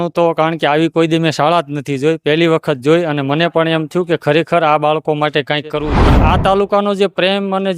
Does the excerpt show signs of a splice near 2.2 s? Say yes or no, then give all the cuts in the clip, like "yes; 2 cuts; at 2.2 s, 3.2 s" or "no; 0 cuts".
no; 1 cut; at 5.9 s